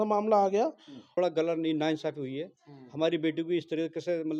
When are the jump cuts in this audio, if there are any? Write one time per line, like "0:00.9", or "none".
0:01.1